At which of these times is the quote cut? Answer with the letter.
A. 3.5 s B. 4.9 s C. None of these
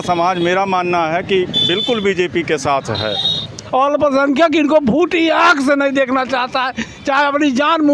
A